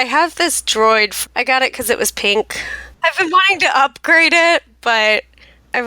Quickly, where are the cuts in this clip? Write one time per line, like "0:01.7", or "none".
0:01.2
0:03.3

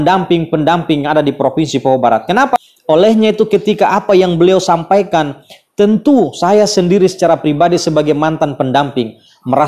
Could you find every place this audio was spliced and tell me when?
0:02.6

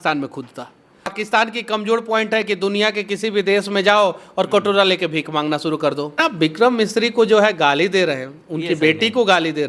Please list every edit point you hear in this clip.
0:01.1
0:06.2

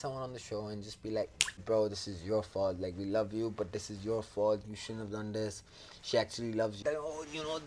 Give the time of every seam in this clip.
0:01.6
0:06.8

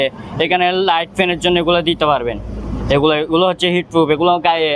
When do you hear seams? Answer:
none

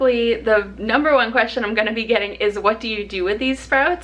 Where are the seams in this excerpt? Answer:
none

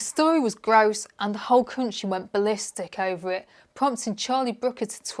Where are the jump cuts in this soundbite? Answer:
none

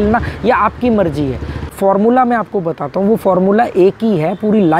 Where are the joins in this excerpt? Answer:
0:01.7

